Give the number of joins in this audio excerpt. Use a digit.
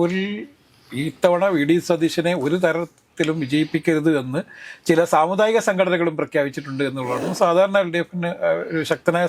1